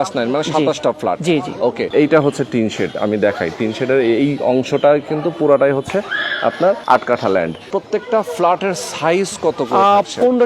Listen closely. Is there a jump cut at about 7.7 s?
yes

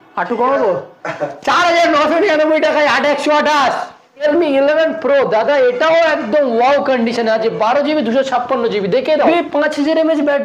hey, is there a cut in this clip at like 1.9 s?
no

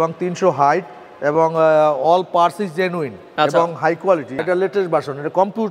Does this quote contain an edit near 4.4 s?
yes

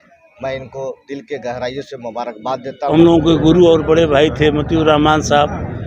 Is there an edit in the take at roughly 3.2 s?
yes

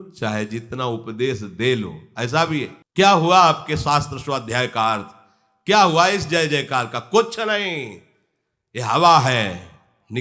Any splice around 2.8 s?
yes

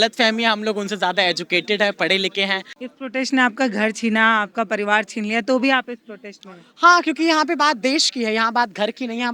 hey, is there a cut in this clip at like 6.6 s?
no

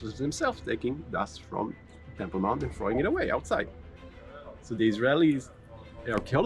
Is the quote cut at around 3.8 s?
no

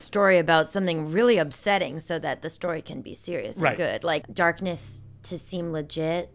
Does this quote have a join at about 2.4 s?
no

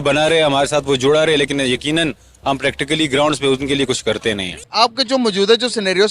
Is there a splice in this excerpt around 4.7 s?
yes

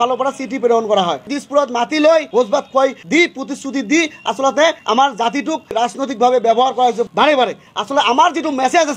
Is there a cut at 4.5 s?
no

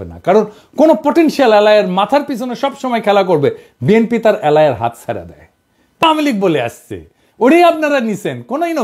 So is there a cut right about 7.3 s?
no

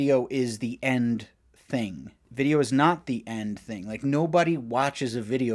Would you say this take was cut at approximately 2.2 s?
yes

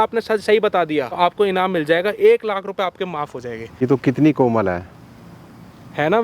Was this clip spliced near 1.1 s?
yes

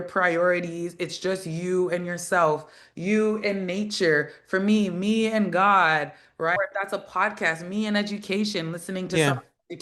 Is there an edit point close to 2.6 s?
no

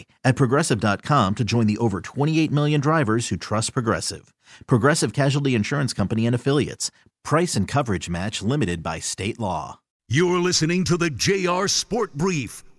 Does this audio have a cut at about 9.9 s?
yes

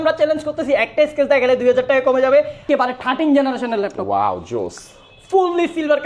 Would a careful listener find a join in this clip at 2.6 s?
yes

